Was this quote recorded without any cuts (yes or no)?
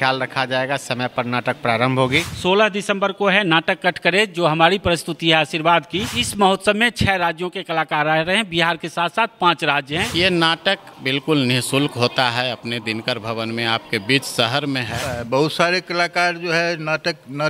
no